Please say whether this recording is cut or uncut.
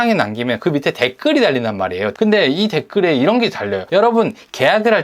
cut